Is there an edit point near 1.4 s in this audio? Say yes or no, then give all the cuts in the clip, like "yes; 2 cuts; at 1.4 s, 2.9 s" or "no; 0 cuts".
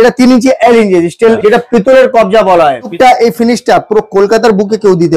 yes; 2 cuts; at 1.4 s, 2.9 s